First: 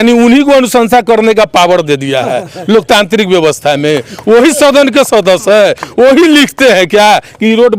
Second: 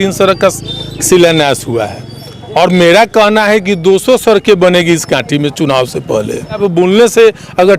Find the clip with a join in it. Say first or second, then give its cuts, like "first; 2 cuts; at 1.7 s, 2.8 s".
second; 1 cut; at 6.6 s